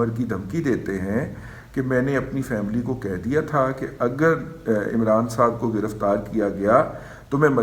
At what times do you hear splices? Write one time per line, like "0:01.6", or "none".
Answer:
none